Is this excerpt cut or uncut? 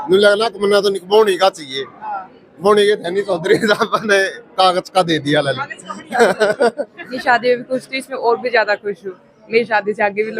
cut